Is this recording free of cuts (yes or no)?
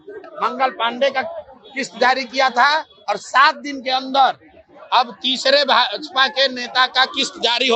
yes